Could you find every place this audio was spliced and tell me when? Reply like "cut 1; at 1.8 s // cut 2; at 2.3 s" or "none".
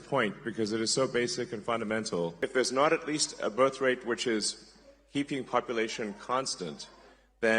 cut 1; at 2.3 s

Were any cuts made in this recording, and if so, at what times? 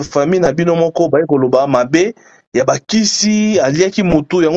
none

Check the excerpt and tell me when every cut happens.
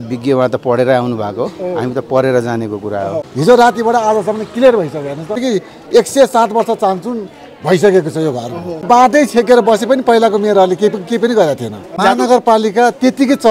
cut 1; at 3.3 s // cut 2; at 5.4 s // cut 3; at 8.8 s // cut 4; at 11.9 s

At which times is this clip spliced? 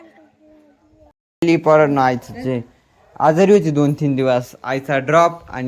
cut 1; at 1.4 s

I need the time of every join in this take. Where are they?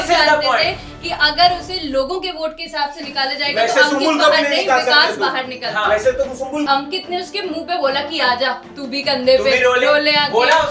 cut 1; at 6.7 s

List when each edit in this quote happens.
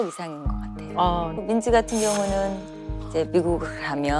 cut 1; at 1.3 s

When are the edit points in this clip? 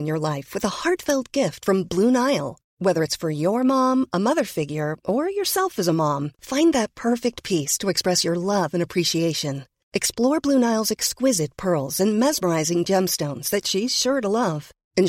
none

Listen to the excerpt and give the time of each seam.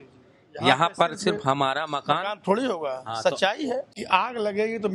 cut 1; at 3.9 s

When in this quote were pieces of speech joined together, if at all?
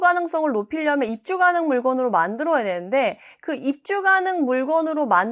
none

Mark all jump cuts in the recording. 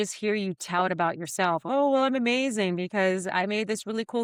none

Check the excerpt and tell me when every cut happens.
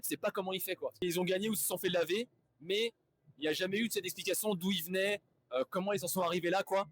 cut 1; at 1.0 s

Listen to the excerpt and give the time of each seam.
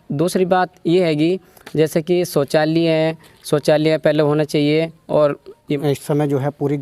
cut 1; at 5.7 s

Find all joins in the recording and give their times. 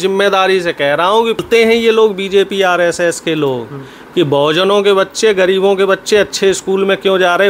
cut 1; at 1.4 s

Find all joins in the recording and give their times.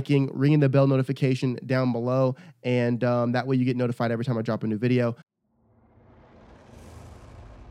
cut 1; at 5.3 s

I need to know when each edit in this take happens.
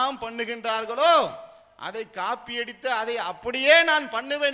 none

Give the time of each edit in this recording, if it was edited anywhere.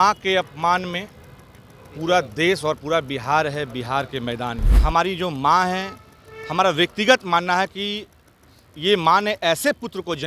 cut 1; at 4.7 s

